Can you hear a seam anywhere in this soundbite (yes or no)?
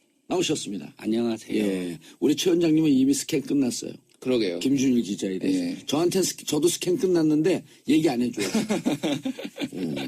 no